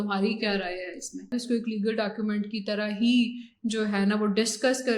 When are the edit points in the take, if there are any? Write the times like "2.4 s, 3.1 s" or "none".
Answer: 1.3 s